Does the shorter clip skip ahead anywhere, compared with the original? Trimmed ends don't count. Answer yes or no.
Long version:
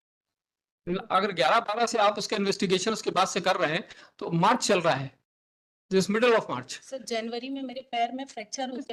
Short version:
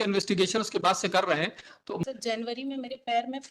yes